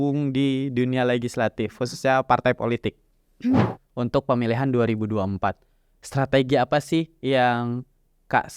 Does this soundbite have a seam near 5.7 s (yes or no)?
no